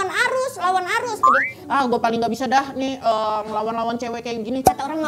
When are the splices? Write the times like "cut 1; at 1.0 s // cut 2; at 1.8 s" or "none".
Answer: cut 1; at 1.2 s